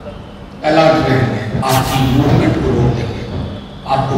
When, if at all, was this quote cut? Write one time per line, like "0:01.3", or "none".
0:01.6